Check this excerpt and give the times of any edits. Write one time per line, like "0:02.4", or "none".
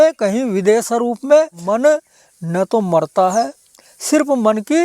0:01.6